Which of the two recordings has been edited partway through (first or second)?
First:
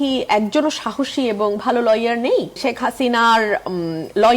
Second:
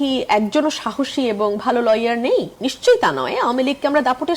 first